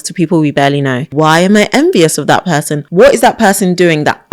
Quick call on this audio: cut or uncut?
cut